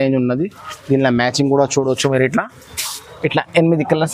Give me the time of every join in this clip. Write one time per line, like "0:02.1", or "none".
none